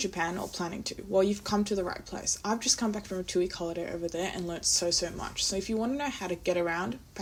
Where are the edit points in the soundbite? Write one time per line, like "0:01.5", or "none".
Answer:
none